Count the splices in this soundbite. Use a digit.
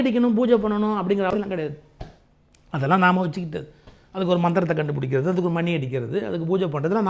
1